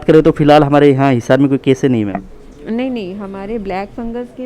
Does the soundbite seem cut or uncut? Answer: uncut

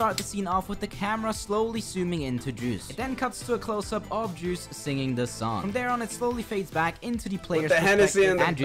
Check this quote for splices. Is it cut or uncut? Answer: uncut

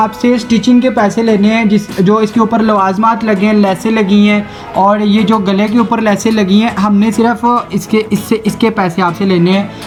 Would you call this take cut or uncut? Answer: uncut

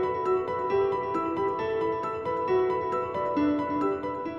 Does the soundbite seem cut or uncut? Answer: uncut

